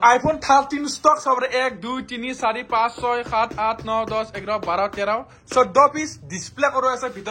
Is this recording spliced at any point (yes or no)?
no